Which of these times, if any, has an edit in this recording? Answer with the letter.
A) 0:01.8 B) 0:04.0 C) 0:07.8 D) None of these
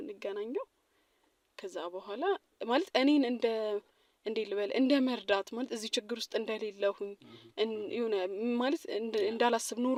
D